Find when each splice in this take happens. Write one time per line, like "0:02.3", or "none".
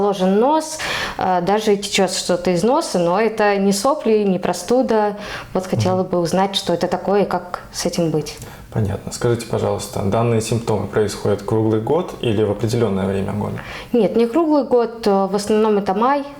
none